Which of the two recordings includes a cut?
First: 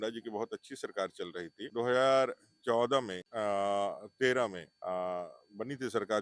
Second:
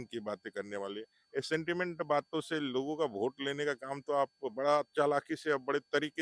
first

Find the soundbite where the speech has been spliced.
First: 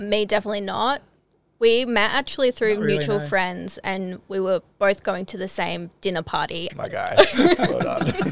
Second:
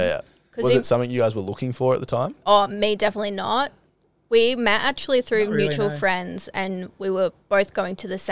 first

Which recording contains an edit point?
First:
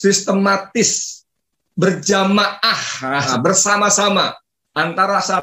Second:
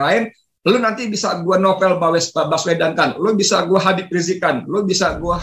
first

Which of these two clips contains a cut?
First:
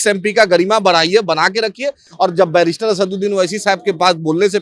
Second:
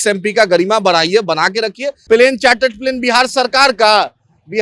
second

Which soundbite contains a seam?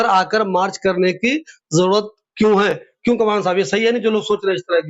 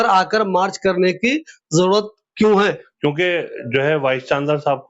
second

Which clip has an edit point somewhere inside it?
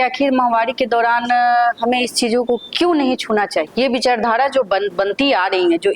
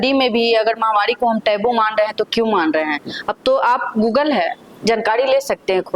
first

